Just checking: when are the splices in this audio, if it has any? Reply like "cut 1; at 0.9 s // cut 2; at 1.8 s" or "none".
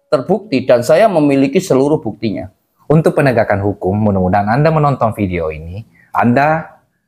cut 1; at 2.7 s